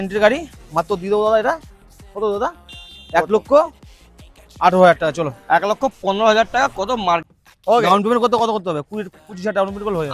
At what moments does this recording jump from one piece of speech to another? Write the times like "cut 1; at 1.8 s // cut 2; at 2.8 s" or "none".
cut 1; at 7.4 s